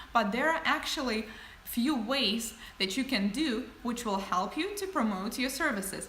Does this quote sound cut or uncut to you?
cut